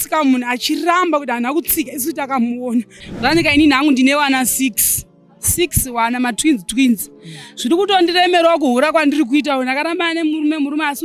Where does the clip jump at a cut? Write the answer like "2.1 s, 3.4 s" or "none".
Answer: 3.0 s